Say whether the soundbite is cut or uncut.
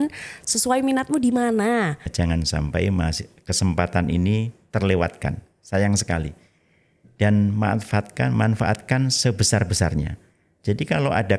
cut